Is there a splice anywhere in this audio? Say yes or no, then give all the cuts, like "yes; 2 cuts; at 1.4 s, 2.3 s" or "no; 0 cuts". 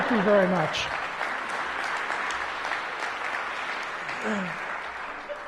no; 0 cuts